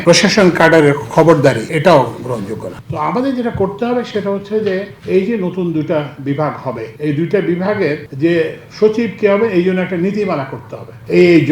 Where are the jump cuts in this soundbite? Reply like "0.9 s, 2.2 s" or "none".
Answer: 2.8 s, 6.9 s